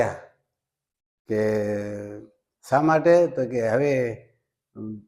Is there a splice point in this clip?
no; 0 cuts

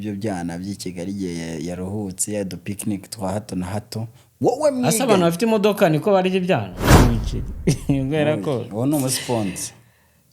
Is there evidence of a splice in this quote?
yes; 1 cut; at 7.0 s

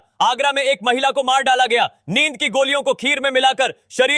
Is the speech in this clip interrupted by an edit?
no; 0 cuts

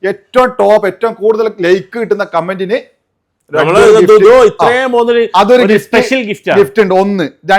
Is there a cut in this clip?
no; 0 cuts

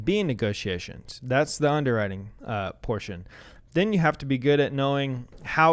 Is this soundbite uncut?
yes; 0 cuts

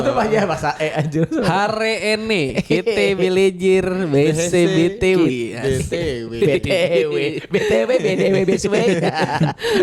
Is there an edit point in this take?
no; 0 cuts

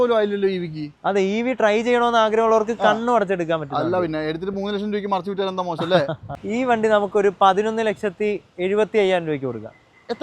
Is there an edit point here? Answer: yes; 1 cut; at 6.3 s

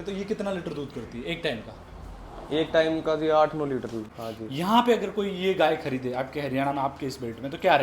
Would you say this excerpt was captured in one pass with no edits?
no; 1 cut; at 4.0 s

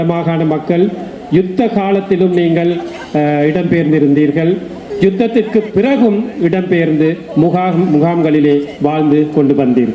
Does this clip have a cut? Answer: no; 0 cuts

